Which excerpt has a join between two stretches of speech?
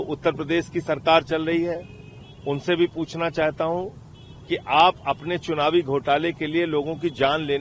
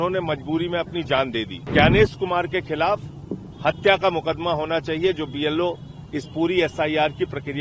second; 1 cut; at 1.7 s

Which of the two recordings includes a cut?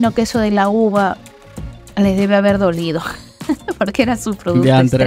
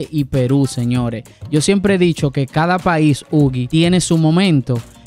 second; 1 cut; at 3.6 s

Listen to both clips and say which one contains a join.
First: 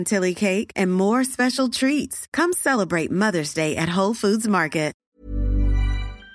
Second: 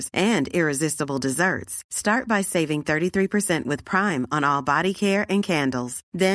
first; 1 cut; at 5.0 s

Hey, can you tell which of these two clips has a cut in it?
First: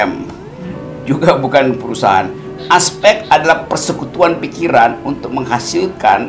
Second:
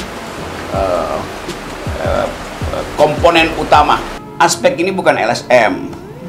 second; 1 cut; at 4.1 s

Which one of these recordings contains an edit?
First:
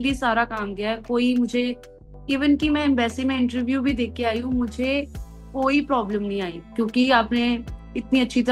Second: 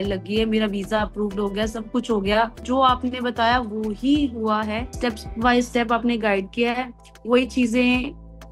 second; 2 cuts; at 2.6 s, 4.9 s

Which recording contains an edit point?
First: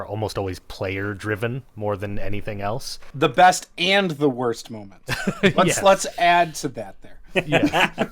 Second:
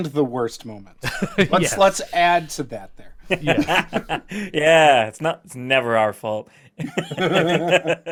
first; 1 cut; at 3.0 s

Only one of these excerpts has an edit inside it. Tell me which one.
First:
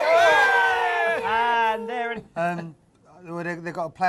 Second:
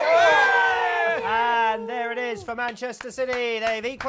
second; 1 cut; at 2.1 s

